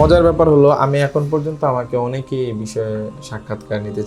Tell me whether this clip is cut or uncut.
uncut